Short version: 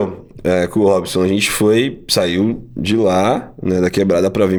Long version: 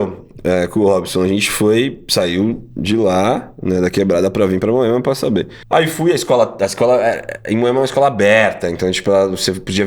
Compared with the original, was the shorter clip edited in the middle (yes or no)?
no